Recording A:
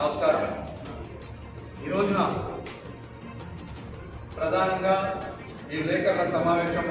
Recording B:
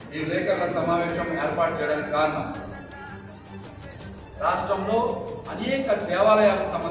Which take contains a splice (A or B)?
B